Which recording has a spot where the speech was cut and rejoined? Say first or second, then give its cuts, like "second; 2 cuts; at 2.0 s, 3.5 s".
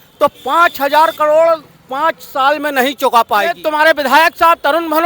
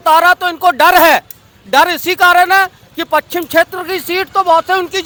first; 1 cut; at 3.6 s